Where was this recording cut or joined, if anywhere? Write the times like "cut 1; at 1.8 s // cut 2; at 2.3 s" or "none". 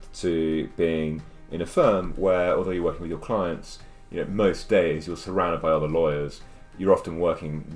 none